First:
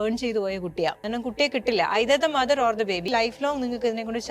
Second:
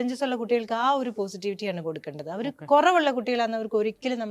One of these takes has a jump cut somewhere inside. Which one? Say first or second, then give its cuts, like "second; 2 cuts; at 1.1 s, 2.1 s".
first; 2 cuts; at 1.0 s, 3.1 s